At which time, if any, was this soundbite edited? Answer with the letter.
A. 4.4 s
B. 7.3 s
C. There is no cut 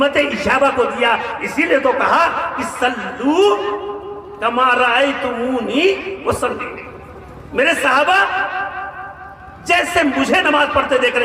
C